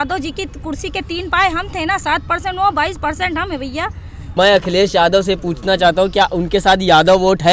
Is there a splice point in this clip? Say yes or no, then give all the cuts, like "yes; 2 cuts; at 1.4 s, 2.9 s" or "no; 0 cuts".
yes; 1 cut; at 4.2 s